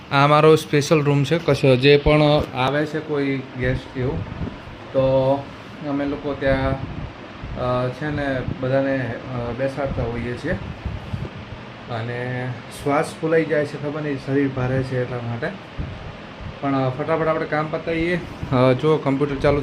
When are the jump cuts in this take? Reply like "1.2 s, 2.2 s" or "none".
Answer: none